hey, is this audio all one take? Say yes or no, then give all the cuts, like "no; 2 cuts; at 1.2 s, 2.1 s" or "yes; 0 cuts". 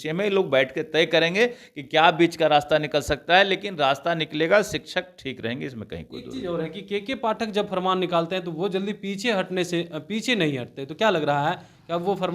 yes; 0 cuts